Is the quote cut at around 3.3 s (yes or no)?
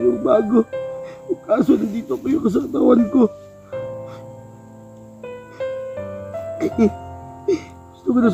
no